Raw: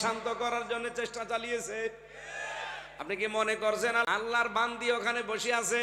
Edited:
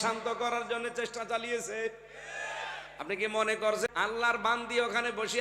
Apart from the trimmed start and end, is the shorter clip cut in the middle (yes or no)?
yes